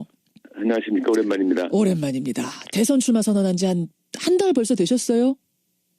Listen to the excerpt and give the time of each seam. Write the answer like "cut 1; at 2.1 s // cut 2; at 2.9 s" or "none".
cut 1; at 3.9 s